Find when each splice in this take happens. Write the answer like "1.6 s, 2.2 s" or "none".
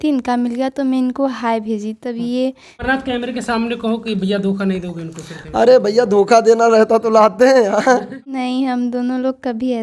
2.8 s, 8.3 s